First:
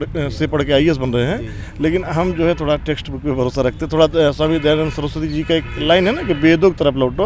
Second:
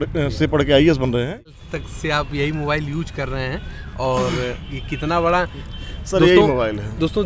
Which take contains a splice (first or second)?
second